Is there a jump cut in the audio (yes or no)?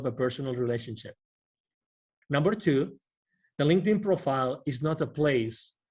yes